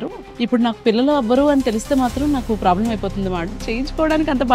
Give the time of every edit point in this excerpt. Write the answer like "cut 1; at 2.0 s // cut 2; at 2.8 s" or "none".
cut 1; at 3.5 s